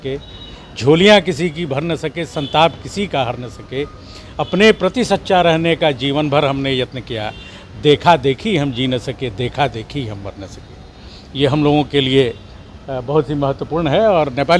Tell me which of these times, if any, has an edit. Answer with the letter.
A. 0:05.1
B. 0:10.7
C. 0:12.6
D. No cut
D